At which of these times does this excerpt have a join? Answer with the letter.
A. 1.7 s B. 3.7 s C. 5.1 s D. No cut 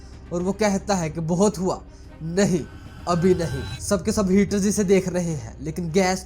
B